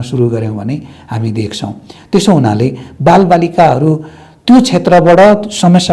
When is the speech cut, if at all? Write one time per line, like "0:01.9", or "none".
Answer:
none